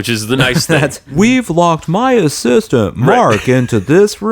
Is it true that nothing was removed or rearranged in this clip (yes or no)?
no